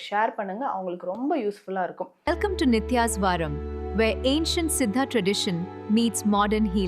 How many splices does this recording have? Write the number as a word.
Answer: one